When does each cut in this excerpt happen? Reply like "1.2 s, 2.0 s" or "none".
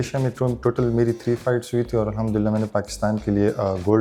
none